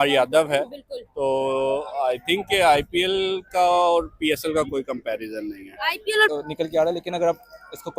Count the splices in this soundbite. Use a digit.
1